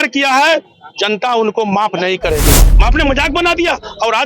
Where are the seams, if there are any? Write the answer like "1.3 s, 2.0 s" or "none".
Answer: 2.7 s